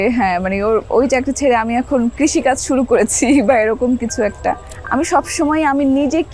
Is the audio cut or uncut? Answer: cut